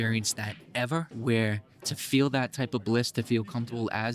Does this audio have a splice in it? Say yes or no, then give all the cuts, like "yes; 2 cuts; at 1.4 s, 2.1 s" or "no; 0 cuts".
yes; 1 cut; at 1.1 s